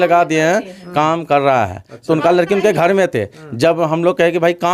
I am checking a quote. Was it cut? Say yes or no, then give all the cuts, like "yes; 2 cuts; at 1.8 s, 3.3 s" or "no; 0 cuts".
no; 0 cuts